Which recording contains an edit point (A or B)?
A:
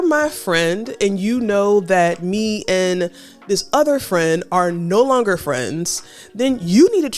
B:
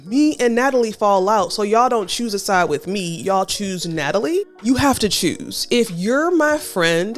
B